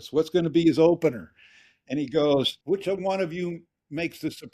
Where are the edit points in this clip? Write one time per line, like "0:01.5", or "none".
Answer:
0:02.5